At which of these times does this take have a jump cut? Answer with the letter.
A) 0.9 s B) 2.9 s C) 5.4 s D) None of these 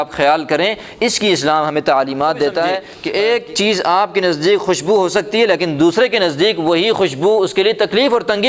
B